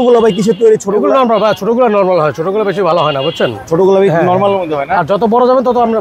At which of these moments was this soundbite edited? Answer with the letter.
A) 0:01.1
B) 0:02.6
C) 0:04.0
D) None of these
D